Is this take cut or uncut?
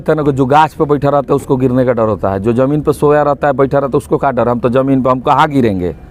uncut